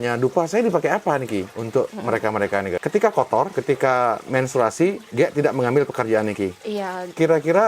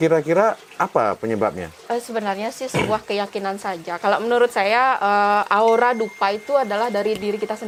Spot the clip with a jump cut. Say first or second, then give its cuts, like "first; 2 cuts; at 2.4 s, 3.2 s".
first; 3 cuts; at 1.6 s, 2.8 s, 3.5 s